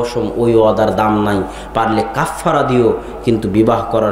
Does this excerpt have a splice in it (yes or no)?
no